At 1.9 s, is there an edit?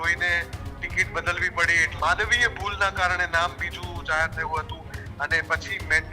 yes; 1 cut; at 1.9 s

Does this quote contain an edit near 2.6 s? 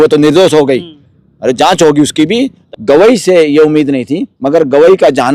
yes; 1 cut; at 2.6 s

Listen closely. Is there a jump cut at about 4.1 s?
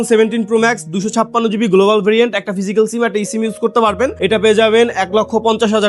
yes; 1 cut; at 4.1 s

